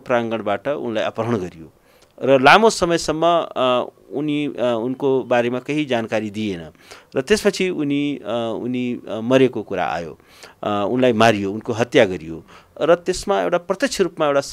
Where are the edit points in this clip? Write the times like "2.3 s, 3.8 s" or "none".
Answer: none